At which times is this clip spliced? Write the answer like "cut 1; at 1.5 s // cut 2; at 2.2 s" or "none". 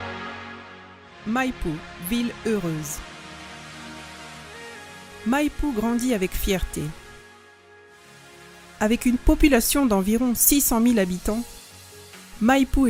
none